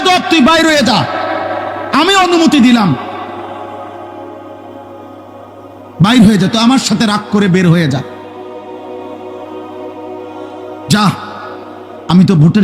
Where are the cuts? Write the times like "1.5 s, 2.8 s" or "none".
none